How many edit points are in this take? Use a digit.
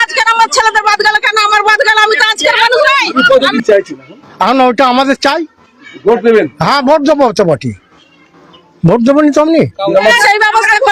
2